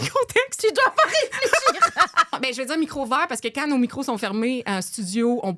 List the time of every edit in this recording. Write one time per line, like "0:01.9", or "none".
0:02.4